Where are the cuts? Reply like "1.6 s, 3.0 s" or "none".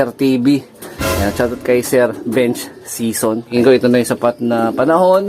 3.5 s